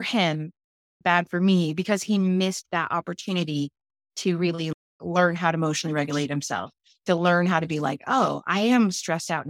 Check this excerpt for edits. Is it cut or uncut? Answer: uncut